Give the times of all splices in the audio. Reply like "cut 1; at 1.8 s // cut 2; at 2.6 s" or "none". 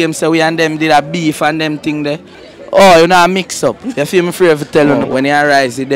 cut 1; at 2.4 s // cut 2; at 5.0 s